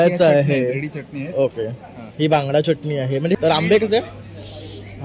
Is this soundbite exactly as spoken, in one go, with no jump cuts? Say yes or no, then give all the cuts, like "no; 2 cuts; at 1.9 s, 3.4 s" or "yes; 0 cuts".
no; 1 cut; at 3.3 s